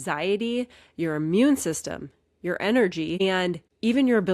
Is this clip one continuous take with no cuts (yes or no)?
no